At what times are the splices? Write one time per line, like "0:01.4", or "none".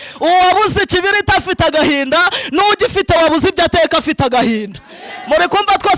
none